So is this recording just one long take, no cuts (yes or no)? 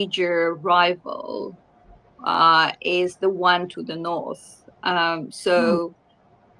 yes